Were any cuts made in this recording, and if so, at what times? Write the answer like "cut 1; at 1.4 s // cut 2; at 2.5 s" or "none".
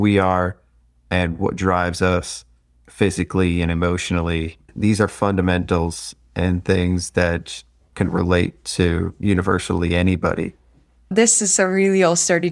cut 1; at 4.7 s // cut 2; at 11.1 s

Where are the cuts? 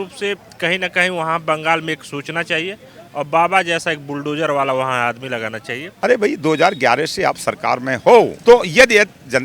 cut 1; at 5.8 s // cut 2; at 8.4 s

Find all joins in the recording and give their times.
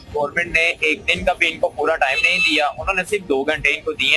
none

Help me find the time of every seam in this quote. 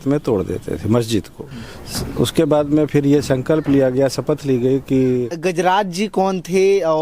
cut 1; at 1.4 s // cut 2; at 5.4 s

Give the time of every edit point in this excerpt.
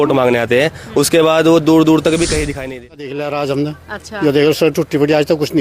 cut 1; at 2.6 s

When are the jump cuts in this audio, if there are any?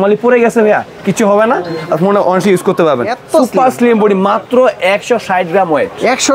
cut 1; at 3.2 s

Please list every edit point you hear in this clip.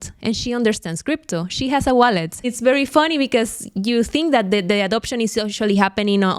cut 1; at 2.5 s

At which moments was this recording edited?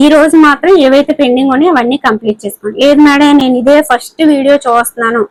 none

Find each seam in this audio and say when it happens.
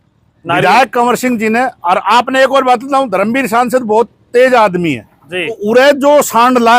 cut 1; at 5.6 s

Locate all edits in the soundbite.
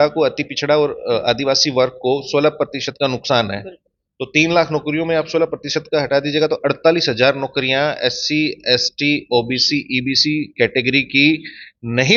none

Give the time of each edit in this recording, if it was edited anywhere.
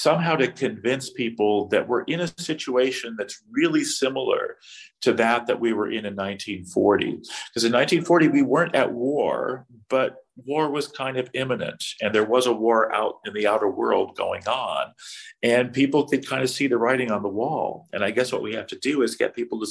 none

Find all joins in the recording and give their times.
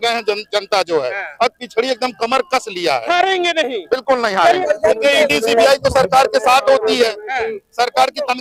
cut 1; at 4.6 s

